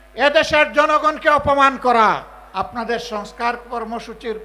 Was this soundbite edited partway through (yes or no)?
yes